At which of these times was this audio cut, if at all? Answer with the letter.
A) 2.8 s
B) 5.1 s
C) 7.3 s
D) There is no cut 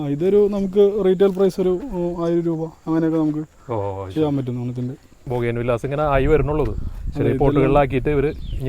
B